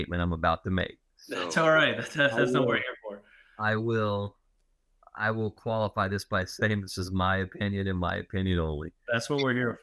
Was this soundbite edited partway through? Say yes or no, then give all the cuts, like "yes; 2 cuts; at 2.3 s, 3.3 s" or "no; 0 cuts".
no; 0 cuts